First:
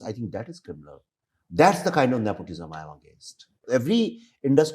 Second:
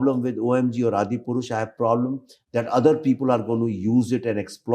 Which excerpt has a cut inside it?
first; 1 cut; at 3.6 s

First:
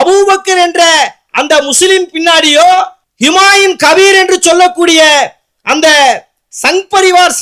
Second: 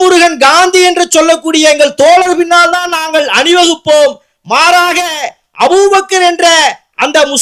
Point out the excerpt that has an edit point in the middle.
first; 1 cut; at 3.0 s

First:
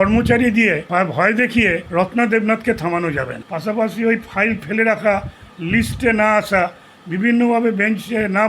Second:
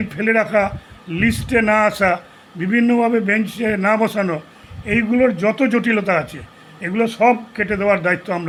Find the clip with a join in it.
first; 3 cuts; at 0.8 s, 1.8 s, 3.4 s

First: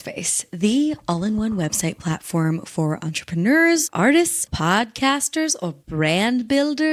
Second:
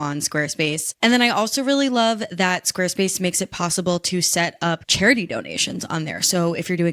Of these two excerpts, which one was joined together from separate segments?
second; 1 cut; at 1.0 s

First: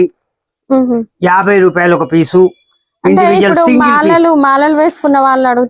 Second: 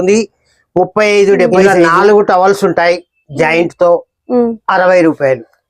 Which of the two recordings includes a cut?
second; 1 cut; at 1.5 s

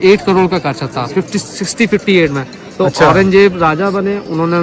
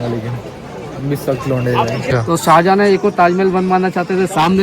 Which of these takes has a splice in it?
second; 1 cut; at 2.1 s

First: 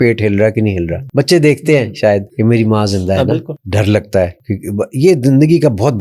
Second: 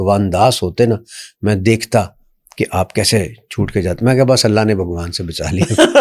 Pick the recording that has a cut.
first; 4 cuts; at 1.0 s, 2.3 s, 3.6 s, 4.5 s

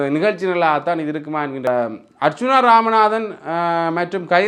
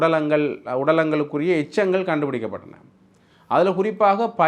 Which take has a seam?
first; 1 cut; at 1.7 s

